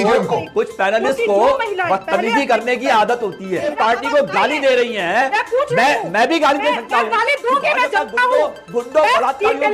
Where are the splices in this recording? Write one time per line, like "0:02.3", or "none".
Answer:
0:03.7